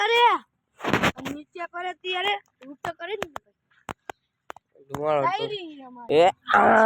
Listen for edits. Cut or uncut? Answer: cut